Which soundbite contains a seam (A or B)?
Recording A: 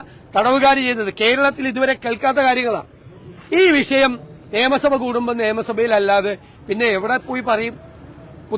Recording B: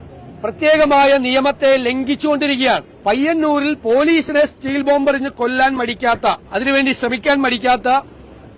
B